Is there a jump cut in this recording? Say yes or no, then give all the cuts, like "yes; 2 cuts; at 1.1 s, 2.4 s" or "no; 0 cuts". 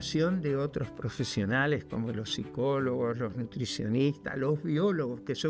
no; 0 cuts